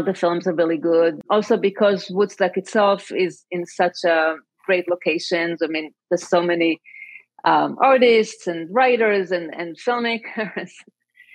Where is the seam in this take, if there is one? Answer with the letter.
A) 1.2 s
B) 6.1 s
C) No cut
A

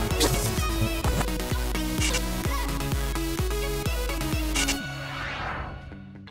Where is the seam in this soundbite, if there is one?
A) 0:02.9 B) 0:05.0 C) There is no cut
B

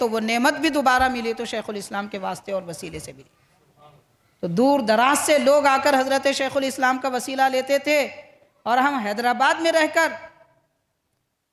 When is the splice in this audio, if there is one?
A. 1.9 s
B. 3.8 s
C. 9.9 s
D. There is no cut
D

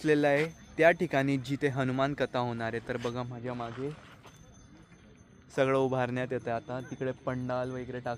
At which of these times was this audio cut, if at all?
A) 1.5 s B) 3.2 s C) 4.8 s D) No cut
D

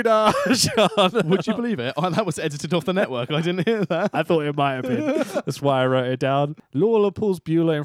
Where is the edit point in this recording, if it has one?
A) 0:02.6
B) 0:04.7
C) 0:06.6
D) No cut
C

